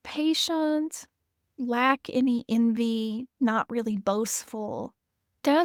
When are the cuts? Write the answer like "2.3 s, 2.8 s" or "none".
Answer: none